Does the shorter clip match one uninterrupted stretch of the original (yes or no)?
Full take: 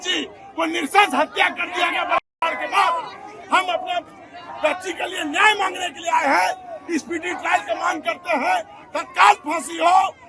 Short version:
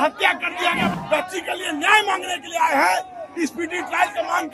no